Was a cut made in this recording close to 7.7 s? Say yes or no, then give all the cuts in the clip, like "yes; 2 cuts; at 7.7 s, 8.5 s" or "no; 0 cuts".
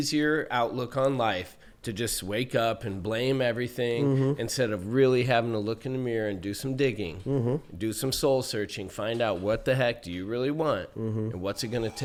no; 0 cuts